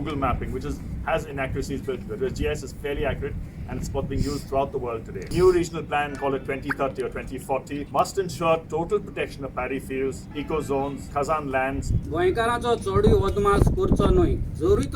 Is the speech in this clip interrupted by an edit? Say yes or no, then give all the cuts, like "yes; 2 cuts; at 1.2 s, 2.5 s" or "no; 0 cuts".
yes; 5 cuts; at 5.3 s, 6.1 s, 7.9 s, 10.7 s, 11.9 s